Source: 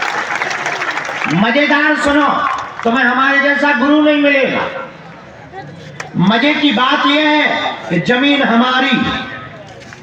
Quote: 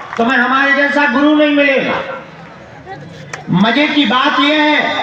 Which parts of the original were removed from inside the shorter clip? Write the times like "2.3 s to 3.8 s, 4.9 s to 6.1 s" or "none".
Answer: none

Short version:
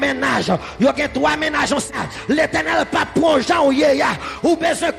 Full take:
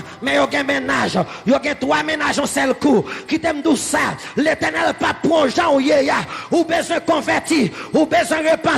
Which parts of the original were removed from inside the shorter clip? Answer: 2.6 s to 4.0 s

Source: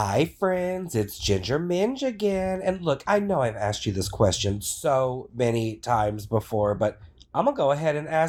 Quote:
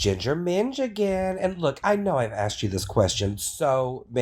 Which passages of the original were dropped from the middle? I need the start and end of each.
none

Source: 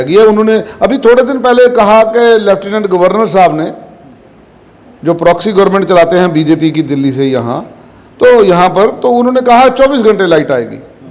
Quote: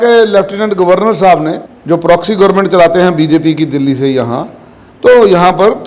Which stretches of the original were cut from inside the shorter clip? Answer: 3.8 s to 4.9 s

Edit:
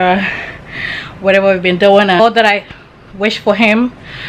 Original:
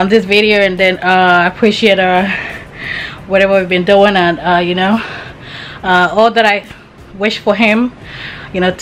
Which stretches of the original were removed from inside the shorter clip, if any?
4.3 s to 6.2 s

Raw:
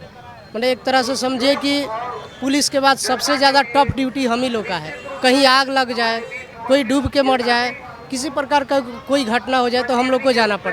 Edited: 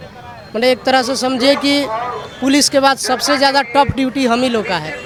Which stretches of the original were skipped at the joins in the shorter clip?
none

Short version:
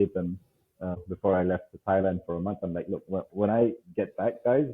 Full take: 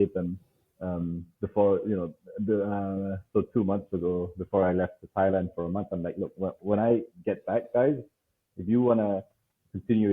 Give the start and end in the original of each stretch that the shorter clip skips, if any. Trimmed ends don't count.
1.0 s to 4.3 s

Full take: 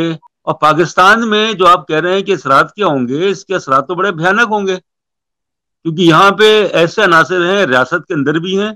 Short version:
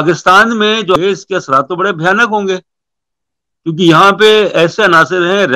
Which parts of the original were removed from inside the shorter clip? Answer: 1.7 s to 3.2 s

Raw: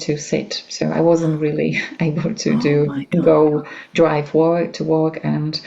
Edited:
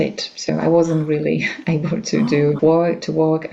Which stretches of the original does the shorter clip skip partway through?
2.9 s to 4.3 s

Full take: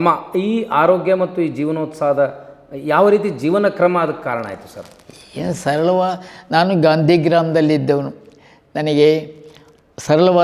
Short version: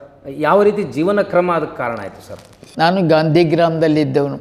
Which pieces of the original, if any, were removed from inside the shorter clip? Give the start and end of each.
5.1 s to 6.3 s

